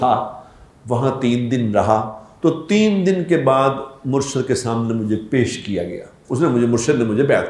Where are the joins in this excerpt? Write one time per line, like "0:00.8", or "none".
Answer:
0:02.2
0:06.1